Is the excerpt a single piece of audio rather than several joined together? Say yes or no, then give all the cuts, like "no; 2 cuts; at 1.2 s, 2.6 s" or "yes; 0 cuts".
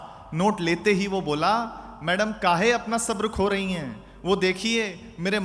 yes; 0 cuts